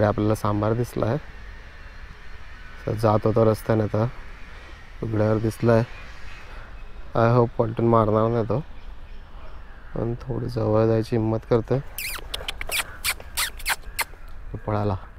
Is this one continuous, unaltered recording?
yes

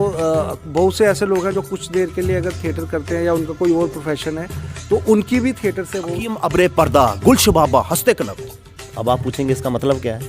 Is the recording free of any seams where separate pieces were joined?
no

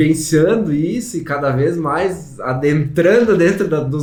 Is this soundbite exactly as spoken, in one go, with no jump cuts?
yes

